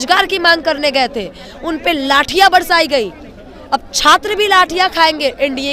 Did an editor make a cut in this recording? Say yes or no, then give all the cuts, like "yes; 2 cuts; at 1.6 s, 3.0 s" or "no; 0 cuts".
no; 0 cuts